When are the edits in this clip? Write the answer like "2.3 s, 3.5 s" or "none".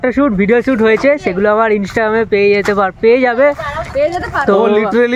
none